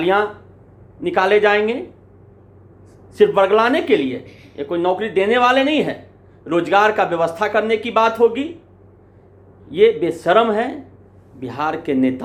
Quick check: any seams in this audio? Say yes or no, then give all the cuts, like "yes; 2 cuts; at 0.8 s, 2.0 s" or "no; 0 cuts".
no; 0 cuts